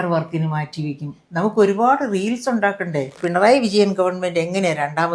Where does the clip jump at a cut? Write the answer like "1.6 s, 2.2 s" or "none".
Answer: 3.2 s